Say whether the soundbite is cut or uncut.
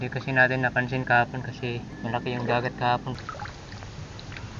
cut